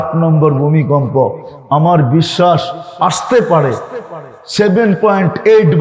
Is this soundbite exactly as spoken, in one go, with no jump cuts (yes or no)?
yes